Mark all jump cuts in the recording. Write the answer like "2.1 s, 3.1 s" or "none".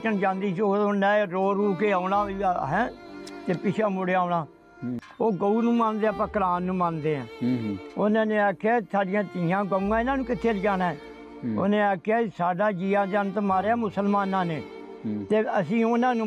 5.0 s